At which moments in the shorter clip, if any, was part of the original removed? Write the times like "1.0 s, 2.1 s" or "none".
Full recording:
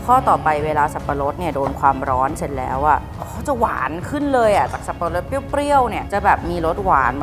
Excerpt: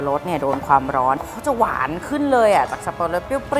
1.2 s